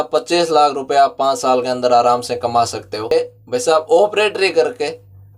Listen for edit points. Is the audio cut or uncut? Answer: cut